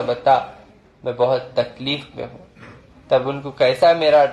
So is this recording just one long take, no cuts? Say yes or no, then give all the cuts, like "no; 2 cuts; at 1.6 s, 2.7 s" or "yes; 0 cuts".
yes; 0 cuts